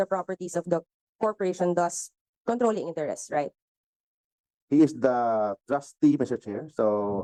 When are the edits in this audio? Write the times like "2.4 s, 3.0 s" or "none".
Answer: none